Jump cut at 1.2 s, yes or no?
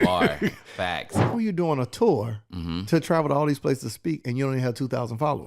yes